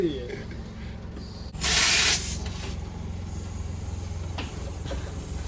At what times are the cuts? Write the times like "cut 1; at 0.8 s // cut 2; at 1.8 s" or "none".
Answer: cut 1; at 1.5 s